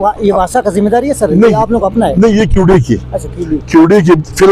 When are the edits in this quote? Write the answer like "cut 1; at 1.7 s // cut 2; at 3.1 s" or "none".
none